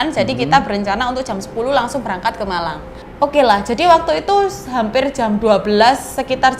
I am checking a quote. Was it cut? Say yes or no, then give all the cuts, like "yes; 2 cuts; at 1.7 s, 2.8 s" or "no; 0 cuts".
yes; 1 cut; at 3.0 s